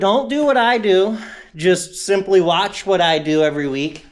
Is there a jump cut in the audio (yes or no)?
no